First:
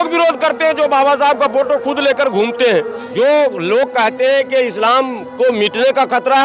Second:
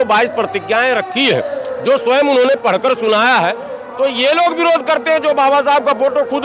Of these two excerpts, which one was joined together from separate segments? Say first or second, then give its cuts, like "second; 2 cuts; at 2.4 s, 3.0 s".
first; 1 cut; at 3.0 s